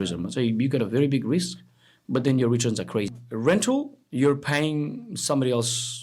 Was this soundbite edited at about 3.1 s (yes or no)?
yes